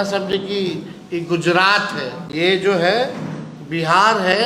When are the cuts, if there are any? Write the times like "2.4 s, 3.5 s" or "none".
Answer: 2.2 s